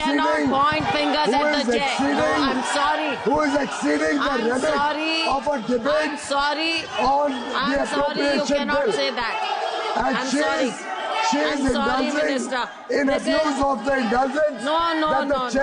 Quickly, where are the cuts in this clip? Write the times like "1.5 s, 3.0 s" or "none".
none